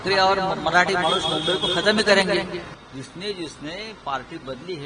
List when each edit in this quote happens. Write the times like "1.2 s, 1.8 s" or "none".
2.7 s